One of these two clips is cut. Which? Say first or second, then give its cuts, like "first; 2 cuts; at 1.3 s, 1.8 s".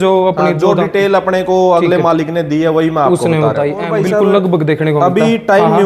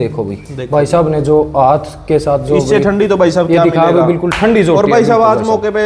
first; 1 cut; at 3.9 s